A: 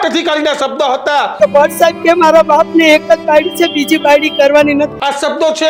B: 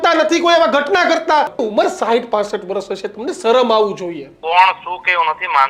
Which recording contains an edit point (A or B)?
B